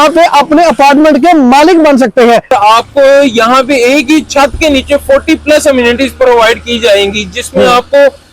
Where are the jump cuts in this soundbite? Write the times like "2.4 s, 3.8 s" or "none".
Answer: 2.5 s